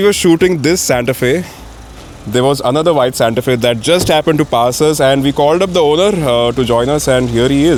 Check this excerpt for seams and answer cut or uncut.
uncut